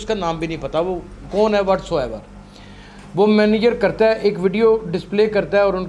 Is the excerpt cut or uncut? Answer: uncut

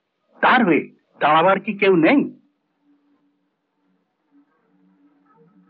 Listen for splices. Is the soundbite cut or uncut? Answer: uncut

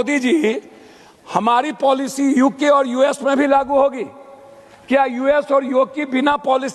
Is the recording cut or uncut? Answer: uncut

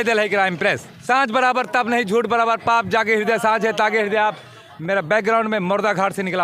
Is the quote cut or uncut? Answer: cut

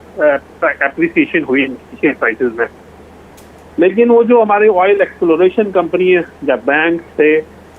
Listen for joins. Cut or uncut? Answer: uncut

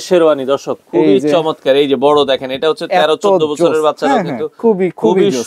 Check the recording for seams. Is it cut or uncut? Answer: uncut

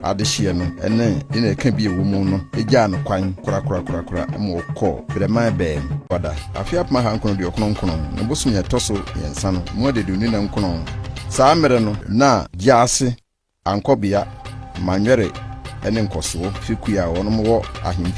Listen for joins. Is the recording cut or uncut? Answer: uncut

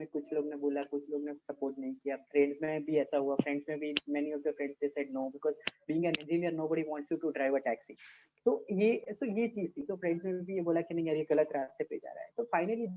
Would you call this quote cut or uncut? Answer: uncut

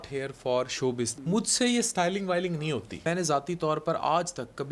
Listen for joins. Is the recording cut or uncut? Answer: cut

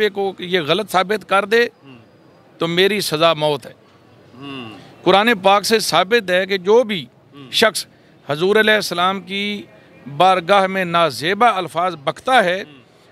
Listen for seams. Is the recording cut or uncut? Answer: uncut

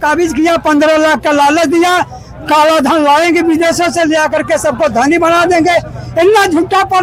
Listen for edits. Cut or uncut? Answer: uncut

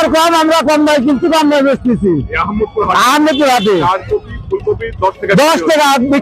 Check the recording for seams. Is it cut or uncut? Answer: uncut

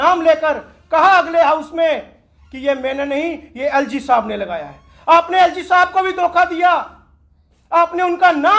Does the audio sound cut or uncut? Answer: uncut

